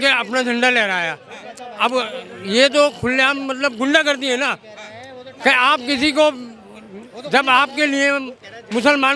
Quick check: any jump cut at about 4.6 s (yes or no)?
no